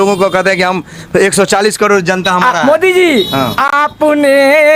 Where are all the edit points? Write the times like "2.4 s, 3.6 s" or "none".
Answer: none